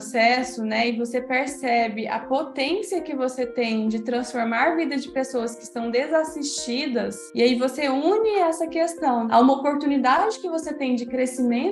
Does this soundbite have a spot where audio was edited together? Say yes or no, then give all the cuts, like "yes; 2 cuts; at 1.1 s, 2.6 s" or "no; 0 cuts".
yes; 1 cut; at 9.3 s